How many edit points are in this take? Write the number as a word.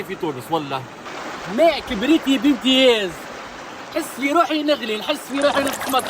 one